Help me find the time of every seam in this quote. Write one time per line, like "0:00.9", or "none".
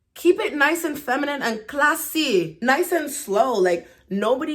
0:02.5